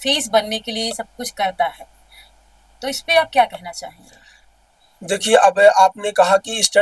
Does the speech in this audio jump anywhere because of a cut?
no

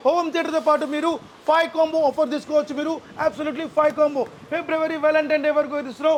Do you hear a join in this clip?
no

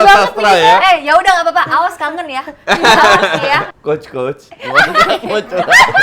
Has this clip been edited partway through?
yes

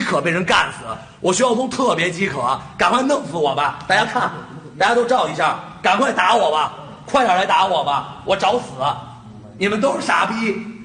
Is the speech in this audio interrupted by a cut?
no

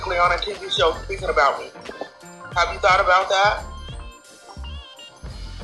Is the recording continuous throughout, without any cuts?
yes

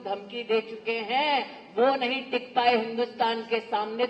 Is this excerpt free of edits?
yes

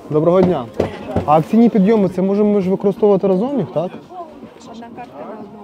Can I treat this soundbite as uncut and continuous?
yes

